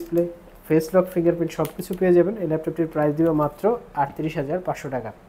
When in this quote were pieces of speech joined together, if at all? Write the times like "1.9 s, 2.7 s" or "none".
none